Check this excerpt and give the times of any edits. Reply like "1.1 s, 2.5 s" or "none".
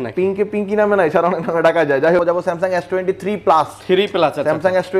2.2 s